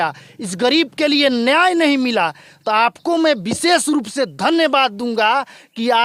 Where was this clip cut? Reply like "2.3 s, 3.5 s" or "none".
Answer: none